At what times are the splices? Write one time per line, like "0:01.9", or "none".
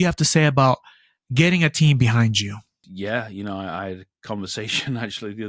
0:02.8